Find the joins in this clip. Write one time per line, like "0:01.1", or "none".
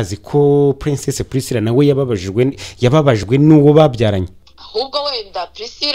0:04.3

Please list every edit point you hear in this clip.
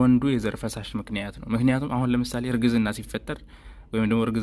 none

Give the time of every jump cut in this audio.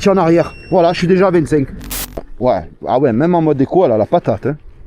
0:01.9

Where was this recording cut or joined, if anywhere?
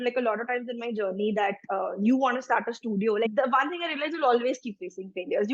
0:03.3

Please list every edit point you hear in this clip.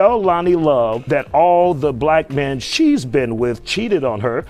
0:01.0

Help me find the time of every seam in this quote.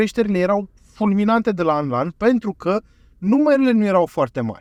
none

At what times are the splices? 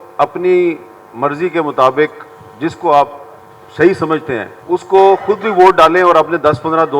0:04.5

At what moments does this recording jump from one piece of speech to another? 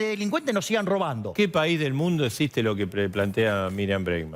0:01.3

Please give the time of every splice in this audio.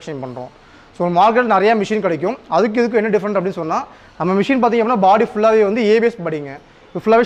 none

